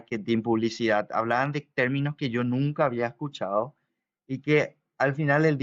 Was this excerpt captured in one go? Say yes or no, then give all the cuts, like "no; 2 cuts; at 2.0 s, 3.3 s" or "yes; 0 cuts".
yes; 0 cuts